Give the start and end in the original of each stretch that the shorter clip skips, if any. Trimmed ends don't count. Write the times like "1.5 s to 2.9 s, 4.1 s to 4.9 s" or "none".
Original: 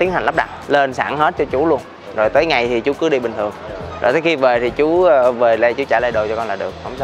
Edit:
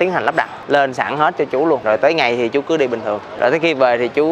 1.8 s to 2.1 s, 3.6 s to 3.9 s